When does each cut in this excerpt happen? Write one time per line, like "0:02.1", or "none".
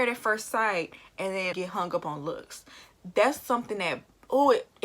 0:01.5